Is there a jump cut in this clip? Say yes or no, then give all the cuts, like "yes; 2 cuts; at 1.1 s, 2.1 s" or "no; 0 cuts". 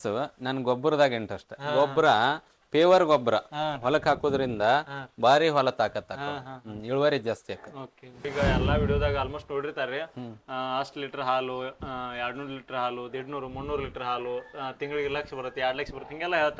yes; 1 cut; at 8.3 s